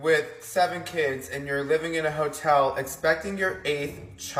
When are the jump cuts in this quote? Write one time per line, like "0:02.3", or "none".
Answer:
none